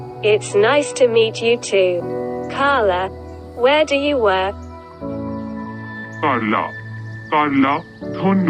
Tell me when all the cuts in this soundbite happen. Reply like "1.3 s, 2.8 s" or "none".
4.7 s, 6.0 s